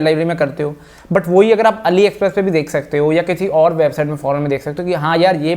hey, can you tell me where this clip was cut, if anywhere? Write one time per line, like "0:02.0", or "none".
none

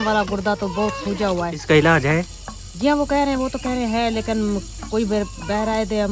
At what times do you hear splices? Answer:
0:01.6

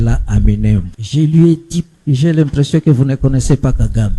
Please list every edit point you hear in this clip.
0:01.0
0:01.9

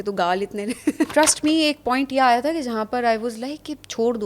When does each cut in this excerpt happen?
0:01.1

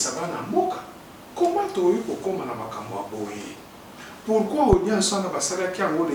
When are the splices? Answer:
none

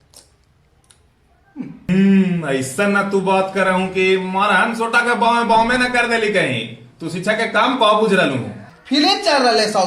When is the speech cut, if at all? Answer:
0:01.8
0:08.7

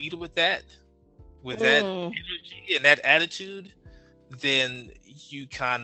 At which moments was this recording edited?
none

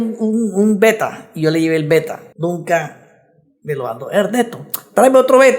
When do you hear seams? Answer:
0:02.2

